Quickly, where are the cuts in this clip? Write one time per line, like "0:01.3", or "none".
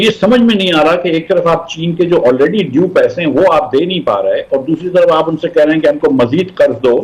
none

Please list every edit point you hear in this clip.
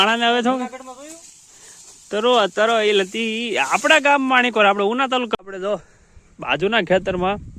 0:05.3

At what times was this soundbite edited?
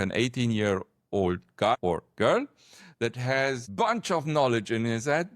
0:01.7
0:03.7

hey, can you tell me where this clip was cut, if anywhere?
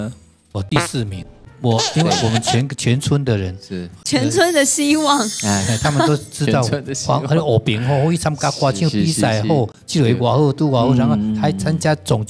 0:01.4

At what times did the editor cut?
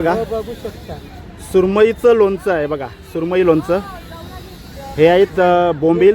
none

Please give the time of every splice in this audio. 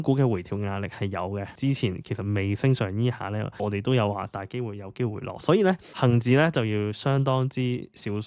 0:01.5
0:03.6
0:05.9

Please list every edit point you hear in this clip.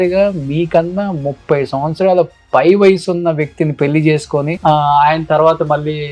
none

